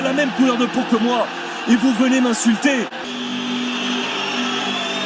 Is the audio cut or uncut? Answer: cut